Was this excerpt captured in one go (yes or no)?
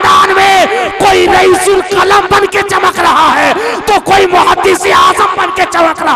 yes